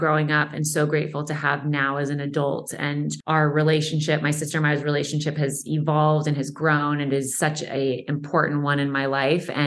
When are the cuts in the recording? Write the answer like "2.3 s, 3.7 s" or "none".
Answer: 3.2 s